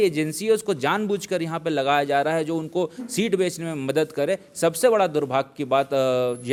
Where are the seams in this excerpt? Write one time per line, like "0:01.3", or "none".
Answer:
none